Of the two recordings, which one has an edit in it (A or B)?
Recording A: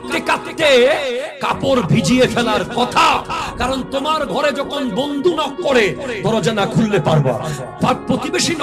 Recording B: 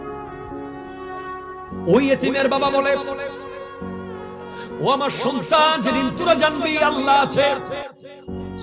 B